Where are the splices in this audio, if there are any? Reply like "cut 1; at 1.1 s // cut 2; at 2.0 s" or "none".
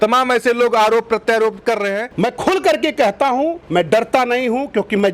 cut 1; at 2.1 s